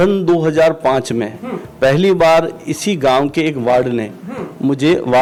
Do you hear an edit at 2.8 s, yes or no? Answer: no